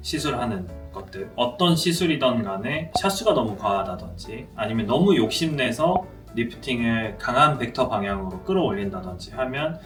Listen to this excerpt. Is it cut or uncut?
uncut